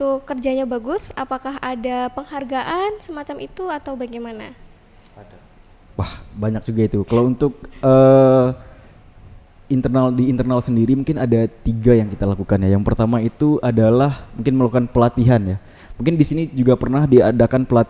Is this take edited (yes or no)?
no